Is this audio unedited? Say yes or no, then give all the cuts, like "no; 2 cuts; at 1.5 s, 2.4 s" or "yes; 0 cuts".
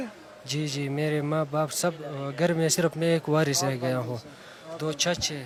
yes; 0 cuts